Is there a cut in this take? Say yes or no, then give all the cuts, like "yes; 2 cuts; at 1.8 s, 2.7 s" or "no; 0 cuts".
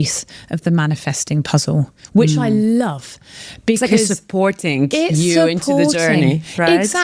no; 0 cuts